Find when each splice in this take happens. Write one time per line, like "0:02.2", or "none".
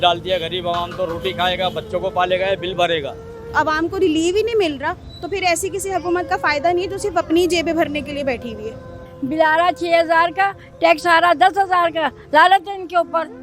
0:03.5
0:09.1